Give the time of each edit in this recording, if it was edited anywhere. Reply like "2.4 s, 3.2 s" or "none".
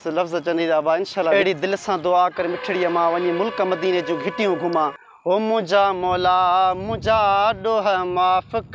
1.3 s, 5.1 s